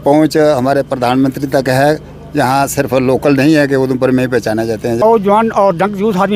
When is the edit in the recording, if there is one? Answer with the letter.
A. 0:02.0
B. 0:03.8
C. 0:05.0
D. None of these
C